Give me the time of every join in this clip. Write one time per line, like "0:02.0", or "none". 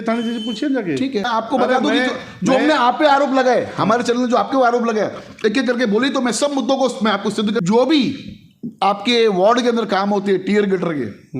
0:01.3
0:07.6